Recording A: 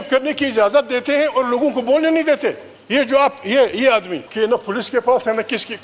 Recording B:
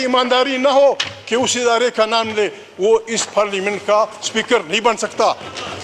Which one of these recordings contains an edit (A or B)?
A